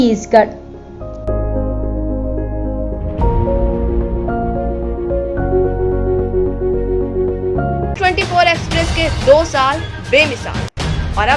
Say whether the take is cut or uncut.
cut